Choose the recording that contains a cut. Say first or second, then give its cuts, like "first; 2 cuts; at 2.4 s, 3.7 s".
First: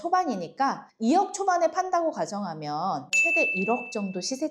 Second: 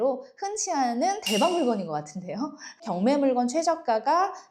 second; 1 cut; at 2.8 s